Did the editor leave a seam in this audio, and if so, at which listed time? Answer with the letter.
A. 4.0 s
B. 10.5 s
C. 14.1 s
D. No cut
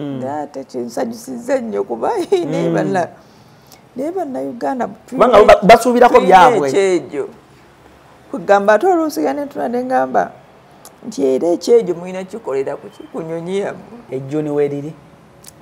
C